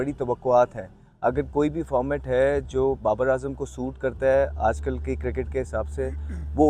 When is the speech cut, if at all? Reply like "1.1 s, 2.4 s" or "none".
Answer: none